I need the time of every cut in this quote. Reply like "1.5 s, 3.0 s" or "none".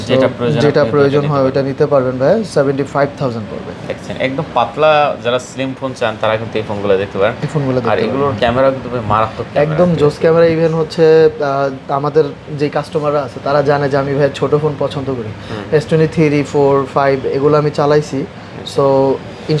none